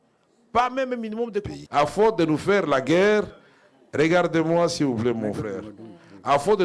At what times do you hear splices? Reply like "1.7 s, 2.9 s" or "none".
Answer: 1.5 s